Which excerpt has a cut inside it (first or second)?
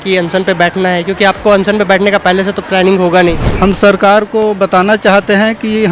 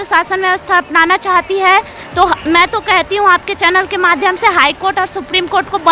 first